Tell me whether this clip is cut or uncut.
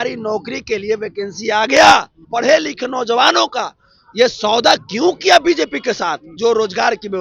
cut